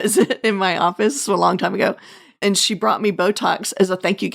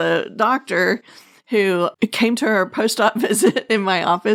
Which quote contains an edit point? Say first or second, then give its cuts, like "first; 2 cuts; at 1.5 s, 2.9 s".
first; 1 cut; at 2.4 s